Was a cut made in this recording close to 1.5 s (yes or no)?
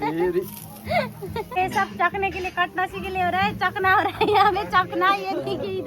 yes